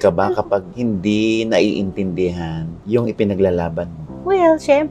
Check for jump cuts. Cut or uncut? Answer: uncut